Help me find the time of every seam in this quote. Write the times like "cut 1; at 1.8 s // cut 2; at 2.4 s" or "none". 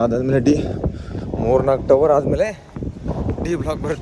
none